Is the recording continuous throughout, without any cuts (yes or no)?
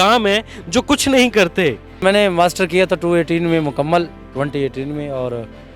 no